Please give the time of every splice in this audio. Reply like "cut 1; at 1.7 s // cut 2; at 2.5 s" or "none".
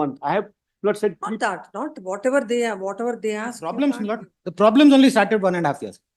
cut 1; at 3.6 s